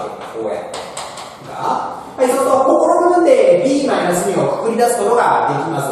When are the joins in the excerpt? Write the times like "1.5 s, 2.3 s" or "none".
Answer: 1.8 s